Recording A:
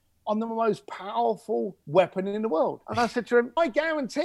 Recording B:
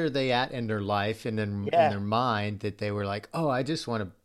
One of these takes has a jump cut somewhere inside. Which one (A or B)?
A